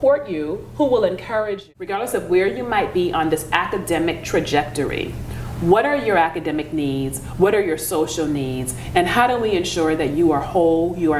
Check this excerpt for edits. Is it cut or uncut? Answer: cut